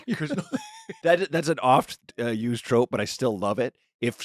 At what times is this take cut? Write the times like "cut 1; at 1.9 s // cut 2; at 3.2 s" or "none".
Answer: cut 1; at 1.0 s // cut 2; at 1.9 s